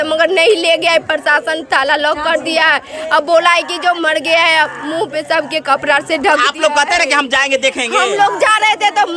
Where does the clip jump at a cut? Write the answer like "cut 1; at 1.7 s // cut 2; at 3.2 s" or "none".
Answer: none